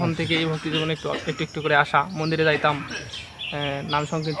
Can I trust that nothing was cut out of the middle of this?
yes; 0 cuts

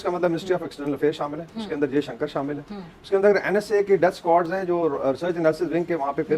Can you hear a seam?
no; 0 cuts

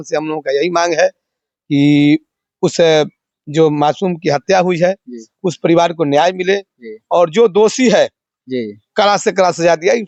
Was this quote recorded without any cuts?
yes; 0 cuts

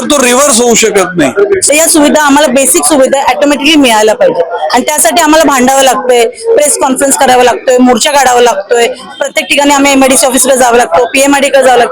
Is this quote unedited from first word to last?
no; 1 cut; at 1.6 s

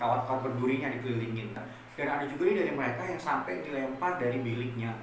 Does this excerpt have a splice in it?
yes; 1 cut; at 1.6 s

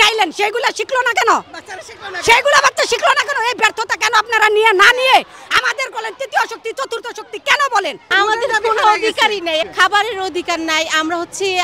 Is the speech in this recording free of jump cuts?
no; 2 cuts; at 8.1 s, 9.7 s

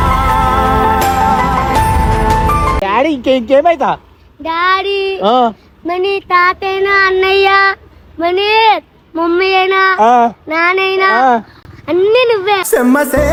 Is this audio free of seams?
yes; 0 cuts

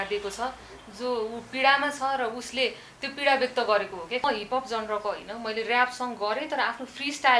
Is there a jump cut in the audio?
yes; 1 cut; at 4.2 s

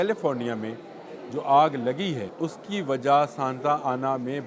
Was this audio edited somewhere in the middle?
yes; 1 cut; at 2.3 s

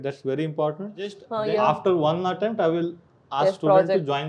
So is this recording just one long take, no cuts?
no; 1 cut; at 1.3 s

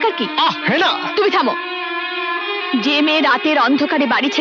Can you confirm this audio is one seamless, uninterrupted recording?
yes; 0 cuts

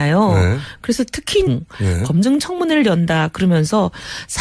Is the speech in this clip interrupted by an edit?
no; 0 cuts

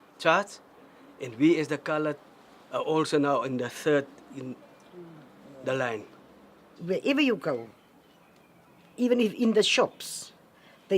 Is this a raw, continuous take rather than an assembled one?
no; 1 cut; at 2.4 s

